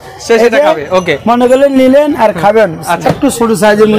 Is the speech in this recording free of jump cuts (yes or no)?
no